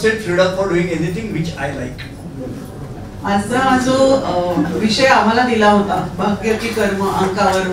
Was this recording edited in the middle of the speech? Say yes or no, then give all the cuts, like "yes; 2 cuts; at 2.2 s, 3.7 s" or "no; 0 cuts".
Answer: yes; 1 cut; at 2.4 s